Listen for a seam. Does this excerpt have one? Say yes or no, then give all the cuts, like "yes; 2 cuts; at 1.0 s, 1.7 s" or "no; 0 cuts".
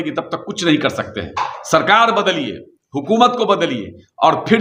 no; 0 cuts